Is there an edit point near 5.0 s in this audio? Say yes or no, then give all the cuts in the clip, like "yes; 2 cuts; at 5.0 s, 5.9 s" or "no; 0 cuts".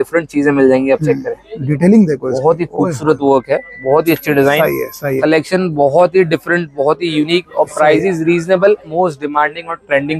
yes; 2 cuts; at 5.0 s, 8.9 s